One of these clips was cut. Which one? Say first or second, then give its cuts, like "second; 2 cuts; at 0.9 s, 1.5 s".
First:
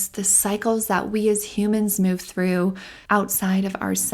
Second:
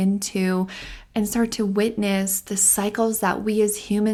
first; 1 cut; at 2.9 s